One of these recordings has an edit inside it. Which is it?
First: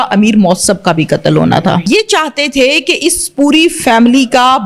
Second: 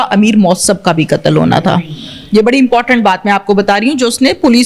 first; 1 cut; at 1.9 s

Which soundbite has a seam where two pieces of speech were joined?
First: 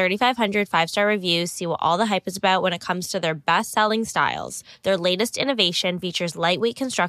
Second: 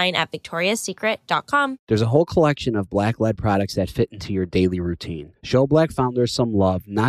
second; 1 cut; at 1.8 s

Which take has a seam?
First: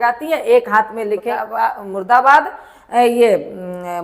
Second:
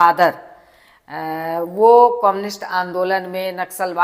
first; 1 cut; at 1.3 s

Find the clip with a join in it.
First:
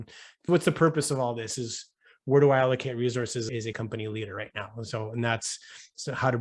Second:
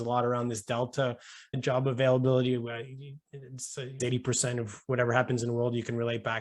second; 1 cut; at 4.0 s

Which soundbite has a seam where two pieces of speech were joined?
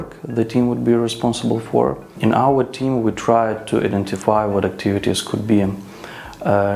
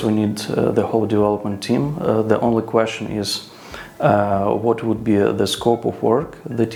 first; 1 cut; at 2.1 s

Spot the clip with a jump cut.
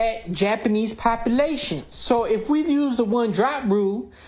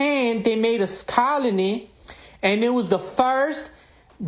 second; 1 cut; at 1.6 s

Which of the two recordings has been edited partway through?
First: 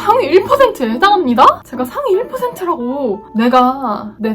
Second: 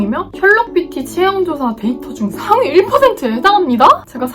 first; 1 cut; at 3.3 s

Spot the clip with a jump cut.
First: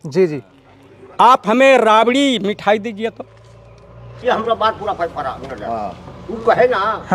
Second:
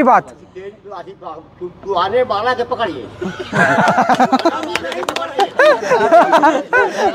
first; 1 cut; at 4.2 s

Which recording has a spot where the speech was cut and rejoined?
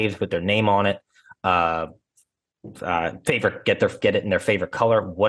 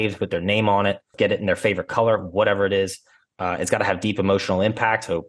second; 1 cut; at 1.1 s

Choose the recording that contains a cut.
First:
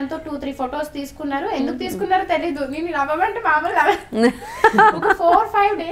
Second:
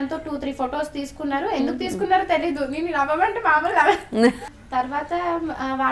second; 1 cut; at 4.5 s

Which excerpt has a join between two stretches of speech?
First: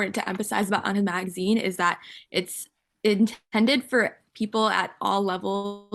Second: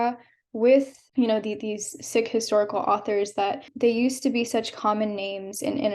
second; 2 cuts; at 1.0 s, 3.7 s

